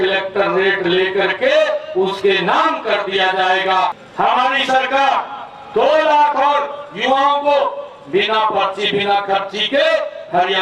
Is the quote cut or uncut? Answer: cut